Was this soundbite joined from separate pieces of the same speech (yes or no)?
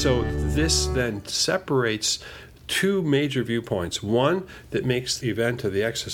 yes